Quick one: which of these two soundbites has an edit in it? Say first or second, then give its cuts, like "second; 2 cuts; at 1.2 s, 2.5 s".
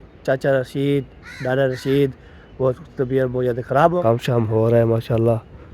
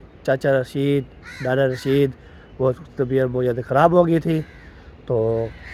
first; 1 cut; at 4.0 s